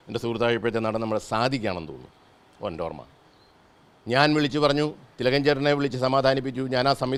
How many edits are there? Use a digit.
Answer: 0